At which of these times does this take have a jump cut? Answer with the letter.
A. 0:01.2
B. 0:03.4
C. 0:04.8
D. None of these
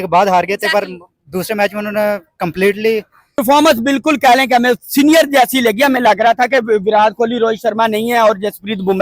B